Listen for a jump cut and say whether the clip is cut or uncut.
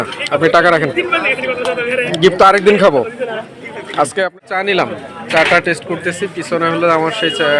cut